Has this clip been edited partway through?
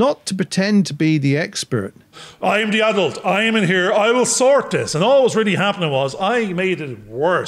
yes; 1 cut; at 2.2 s

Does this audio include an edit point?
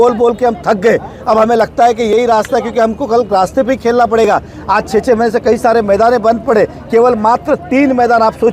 no; 0 cuts

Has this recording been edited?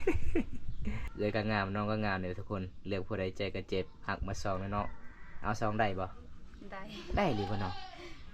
yes; 1 cut; at 1.0 s

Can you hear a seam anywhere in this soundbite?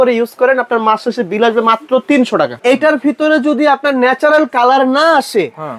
yes; 1 cut; at 2.6 s

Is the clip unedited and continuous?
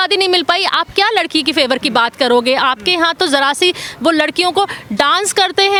yes; 0 cuts

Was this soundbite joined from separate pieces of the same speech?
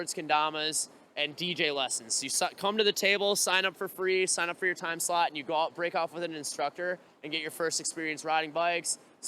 no; 0 cuts

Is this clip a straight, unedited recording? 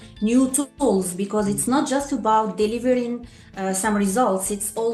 yes; 0 cuts

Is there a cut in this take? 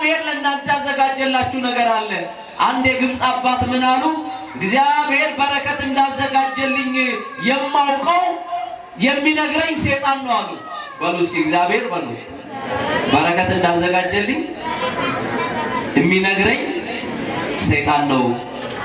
no; 0 cuts

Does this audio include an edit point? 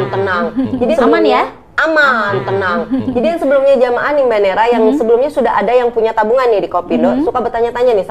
yes; 2 cuts; at 1.0 s, 3.3 s

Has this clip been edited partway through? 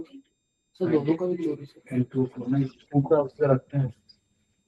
yes; 1 cut; at 2.8 s

